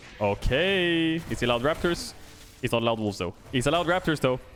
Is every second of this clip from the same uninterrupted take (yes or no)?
yes